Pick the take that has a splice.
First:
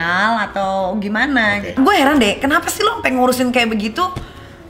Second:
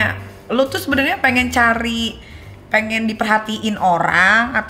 first; 1 cut; at 1.7 s

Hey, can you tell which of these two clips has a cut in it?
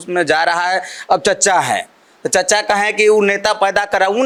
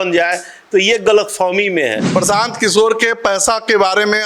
second; 1 cut; at 2.0 s

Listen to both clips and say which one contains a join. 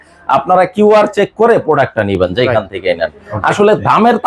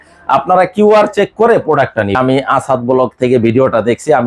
second; 1 cut; at 2.2 s

